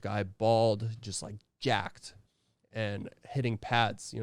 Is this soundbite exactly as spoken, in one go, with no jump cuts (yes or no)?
yes